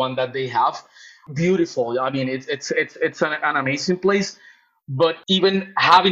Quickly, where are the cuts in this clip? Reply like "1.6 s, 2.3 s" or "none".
1.1 s, 5.2 s